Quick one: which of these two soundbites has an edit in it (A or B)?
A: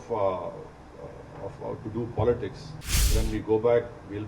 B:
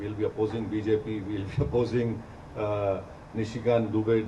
A